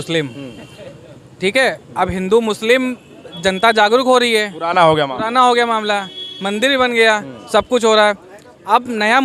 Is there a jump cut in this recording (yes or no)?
no